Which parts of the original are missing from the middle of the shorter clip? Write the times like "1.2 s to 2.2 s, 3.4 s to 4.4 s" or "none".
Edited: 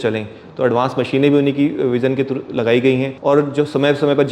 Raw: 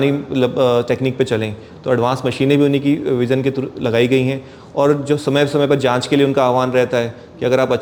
4.4 s to 4.6 s